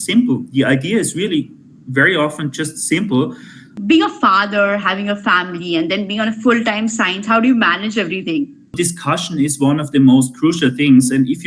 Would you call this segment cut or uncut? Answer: cut